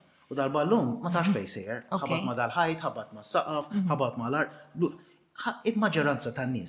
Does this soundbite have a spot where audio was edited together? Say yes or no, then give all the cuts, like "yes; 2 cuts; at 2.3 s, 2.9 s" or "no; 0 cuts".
no; 0 cuts